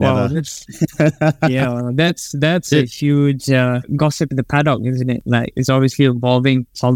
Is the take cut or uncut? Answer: uncut